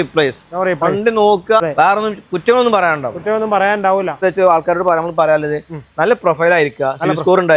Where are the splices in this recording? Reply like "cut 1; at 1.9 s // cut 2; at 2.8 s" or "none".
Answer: cut 1; at 1.6 s // cut 2; at 4.2 s